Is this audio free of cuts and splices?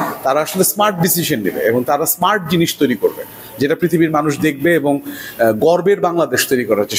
yes; 0 cuts

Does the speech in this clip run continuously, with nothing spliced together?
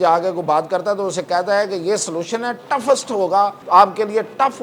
no; 1 cut; at 3.6 s

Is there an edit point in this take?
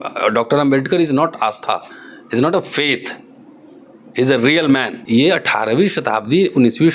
yes; 1 cut; at 4.9 s

